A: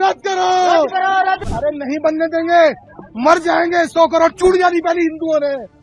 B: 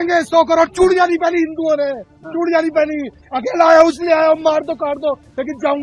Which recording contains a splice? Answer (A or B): A